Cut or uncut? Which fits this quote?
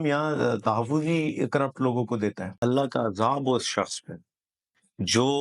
cut